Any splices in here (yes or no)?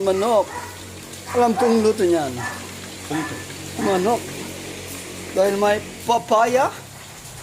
no